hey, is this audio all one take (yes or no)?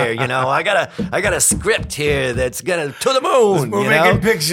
yes